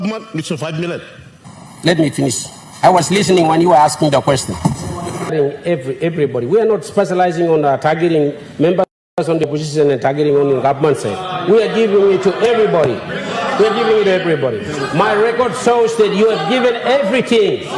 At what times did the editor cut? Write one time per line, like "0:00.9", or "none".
0:01.4
0:05.3